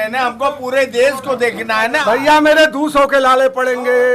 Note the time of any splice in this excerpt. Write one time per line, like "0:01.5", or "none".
0:02.0